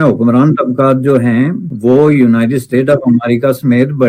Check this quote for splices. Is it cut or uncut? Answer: cut